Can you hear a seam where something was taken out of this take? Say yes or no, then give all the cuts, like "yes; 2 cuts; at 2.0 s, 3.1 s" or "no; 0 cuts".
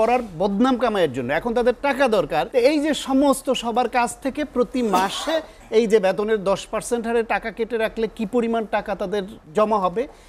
yes; 2 cuts; at 2.5 s, 9.4 s